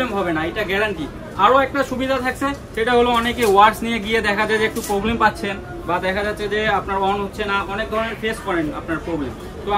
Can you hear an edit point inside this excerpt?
no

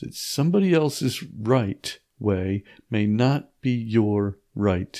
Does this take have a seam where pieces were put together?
no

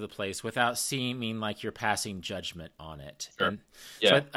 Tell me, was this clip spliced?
no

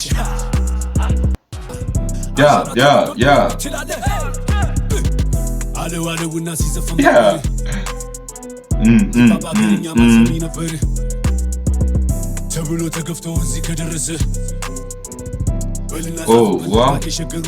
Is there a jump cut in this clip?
yes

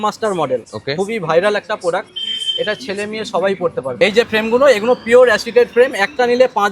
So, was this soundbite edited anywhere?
yes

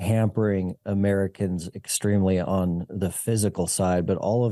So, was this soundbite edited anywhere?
no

